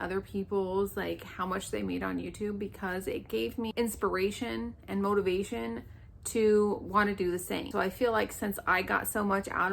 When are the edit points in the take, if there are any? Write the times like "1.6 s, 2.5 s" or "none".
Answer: 3.7 s, 7.7 s